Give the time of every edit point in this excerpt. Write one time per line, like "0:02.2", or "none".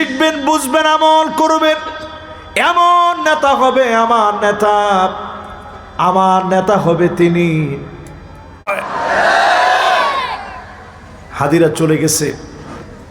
0:08.7